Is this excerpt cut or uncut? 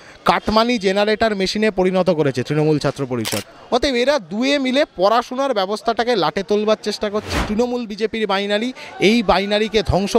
cut